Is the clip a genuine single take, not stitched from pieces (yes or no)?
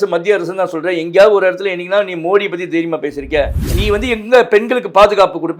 no